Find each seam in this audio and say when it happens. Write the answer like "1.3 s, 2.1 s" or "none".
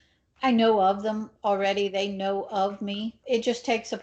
none